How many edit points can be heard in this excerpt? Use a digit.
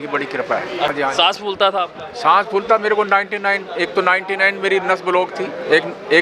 1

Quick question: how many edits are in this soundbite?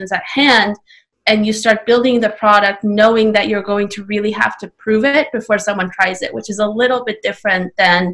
0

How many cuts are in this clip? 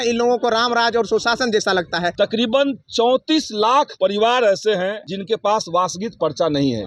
3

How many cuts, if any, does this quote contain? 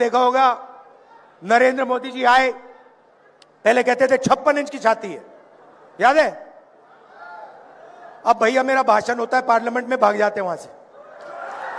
0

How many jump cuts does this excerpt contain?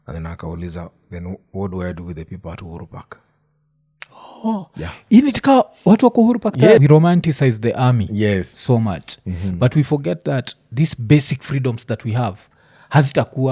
1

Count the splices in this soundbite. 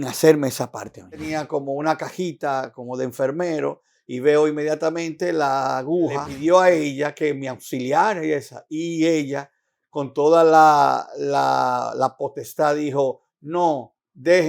2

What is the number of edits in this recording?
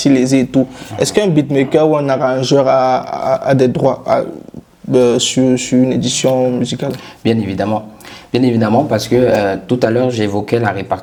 0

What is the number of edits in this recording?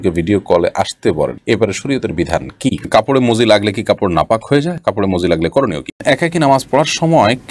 2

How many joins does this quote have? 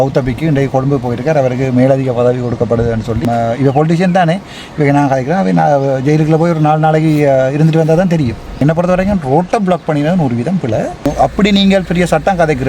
3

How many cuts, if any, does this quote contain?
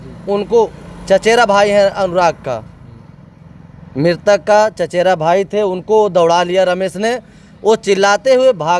0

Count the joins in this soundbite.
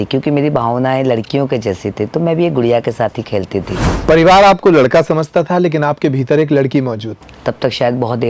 2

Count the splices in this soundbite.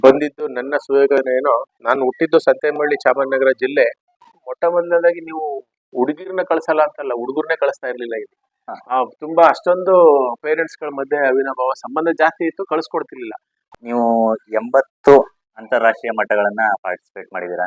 2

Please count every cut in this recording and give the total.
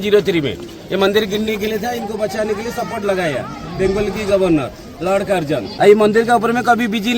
1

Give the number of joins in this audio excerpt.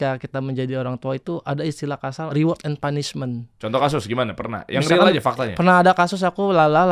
2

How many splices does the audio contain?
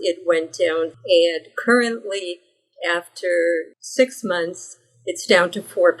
1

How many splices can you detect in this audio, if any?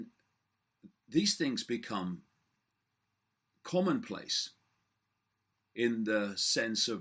0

